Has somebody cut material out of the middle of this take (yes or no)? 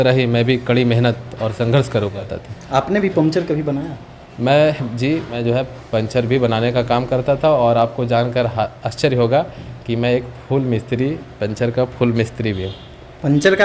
yes